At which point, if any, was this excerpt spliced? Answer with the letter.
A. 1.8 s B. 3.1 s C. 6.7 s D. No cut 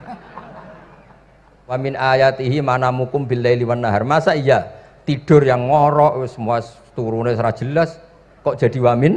A